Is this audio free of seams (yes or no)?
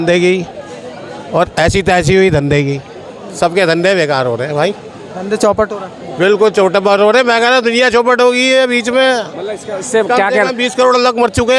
yes